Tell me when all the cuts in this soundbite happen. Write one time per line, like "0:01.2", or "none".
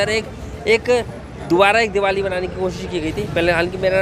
none